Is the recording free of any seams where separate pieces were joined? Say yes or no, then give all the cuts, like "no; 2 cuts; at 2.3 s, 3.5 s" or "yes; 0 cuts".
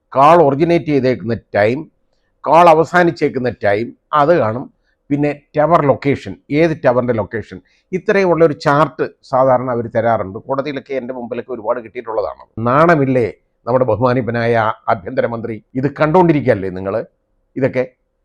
no; 3 cuts; at 4.0 s, 12.6 s, 15.6 s